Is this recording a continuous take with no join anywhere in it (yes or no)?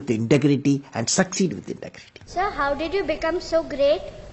no